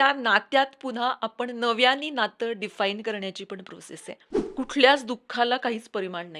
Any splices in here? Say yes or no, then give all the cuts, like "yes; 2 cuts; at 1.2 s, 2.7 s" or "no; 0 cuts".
yes; 1 cut; at 4.5 s